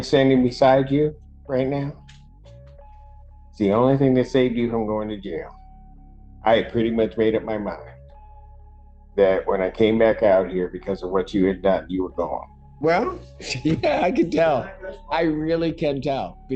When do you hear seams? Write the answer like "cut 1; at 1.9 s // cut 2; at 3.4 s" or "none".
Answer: cut 1; at 12.6 s